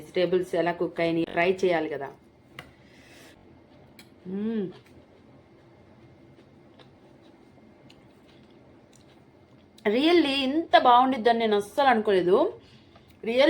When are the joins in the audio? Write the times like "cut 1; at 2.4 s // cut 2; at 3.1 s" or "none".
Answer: cut 1; at 1.2 s // cut 2; at 3.4 s